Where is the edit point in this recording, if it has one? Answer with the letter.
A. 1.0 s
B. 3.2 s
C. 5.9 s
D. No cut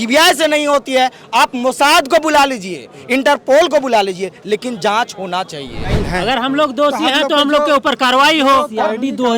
C